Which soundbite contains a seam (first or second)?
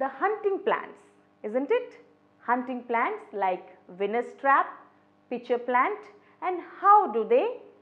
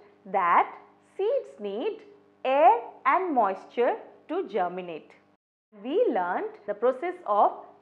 second